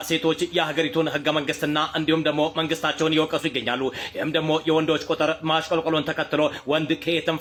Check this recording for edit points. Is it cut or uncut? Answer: uncut